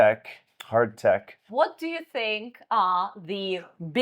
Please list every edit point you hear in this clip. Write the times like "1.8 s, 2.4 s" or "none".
1.4 s